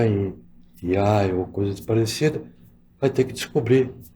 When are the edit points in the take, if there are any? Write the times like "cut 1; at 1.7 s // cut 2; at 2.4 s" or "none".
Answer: none